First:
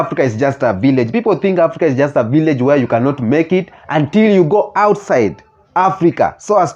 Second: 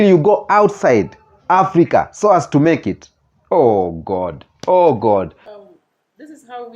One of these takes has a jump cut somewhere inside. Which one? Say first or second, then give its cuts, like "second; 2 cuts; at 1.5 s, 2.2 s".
second; 1 cut; at 5.4 s